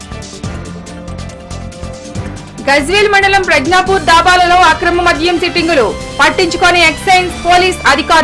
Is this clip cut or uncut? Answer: cut